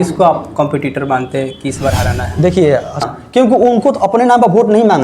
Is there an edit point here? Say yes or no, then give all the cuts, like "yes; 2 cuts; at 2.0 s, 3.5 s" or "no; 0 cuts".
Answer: yes; 1 cut; at 3.0 s